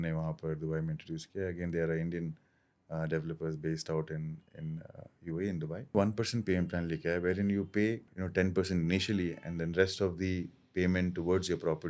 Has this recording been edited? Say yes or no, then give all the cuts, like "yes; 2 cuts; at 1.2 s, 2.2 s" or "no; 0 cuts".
yes; 1 cut; at 5.9 s